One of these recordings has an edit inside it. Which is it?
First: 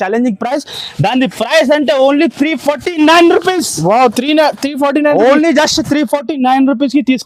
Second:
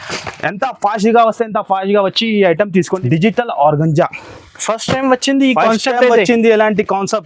second; 1 cut; at 2.9 s

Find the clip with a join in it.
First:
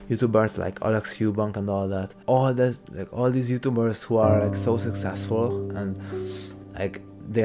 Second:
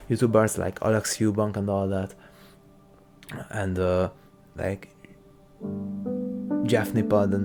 first; 1 cut; at 2.2 s

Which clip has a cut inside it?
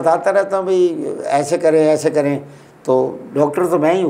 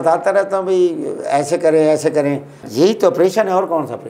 second; 1 cut; at 2.6 s

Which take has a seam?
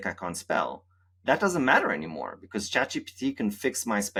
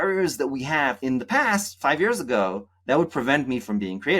second; 1 cut; at 1.0 s

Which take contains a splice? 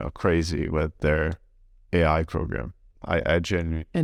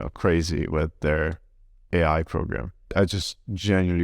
second; 1 cut; at 2.9 s

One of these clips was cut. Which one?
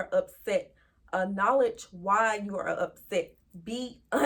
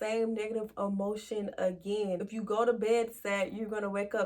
second; 1 cut; at 2.3 s

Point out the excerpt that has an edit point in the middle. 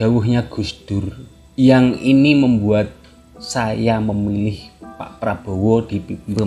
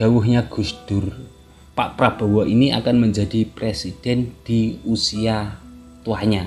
second; 1 cut; at 1.5 s

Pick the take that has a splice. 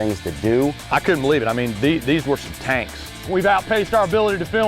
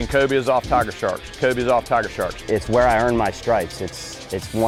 first; 2 cuts; at 0.8 s, 3.2 s

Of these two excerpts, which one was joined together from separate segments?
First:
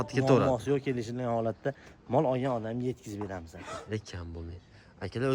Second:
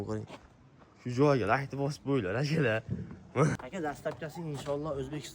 second; 1 cut; at 3.6 s

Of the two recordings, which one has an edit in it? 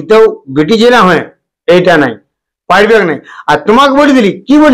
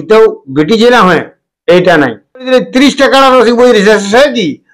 second; 1 cut; at 2.4 s

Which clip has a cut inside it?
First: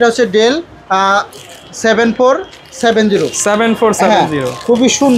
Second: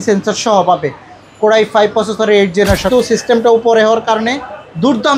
second; 1 cut; at 2.9 s

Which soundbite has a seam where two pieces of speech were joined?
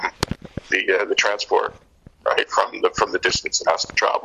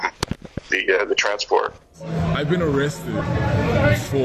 second; 1 cut; at 2.1 s

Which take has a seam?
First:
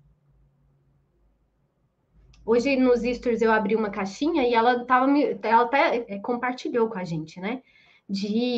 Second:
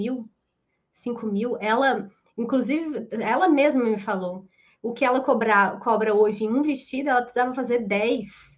first; 1 cut; at 6.1 s

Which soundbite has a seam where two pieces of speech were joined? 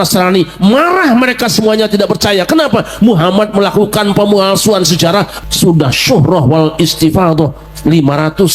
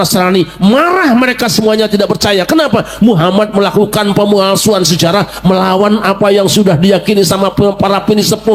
first; 1 cut; at 5.3 s

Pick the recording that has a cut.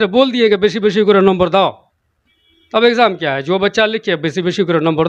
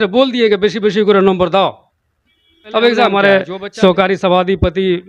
second; 1 cut; at 3.1 s

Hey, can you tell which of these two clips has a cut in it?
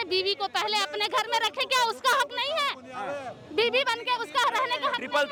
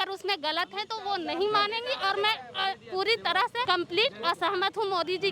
second; 1 cut; at 3.6 s

